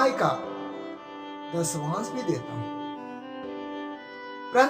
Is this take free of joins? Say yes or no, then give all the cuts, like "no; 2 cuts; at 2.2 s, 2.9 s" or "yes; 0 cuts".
yes; 0 cuts